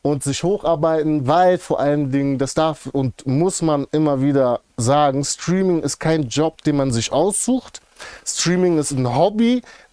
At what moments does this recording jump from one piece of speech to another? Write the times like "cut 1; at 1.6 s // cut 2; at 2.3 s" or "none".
none